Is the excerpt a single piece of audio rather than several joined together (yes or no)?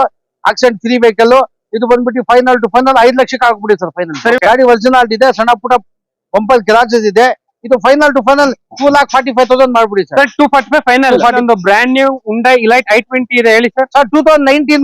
no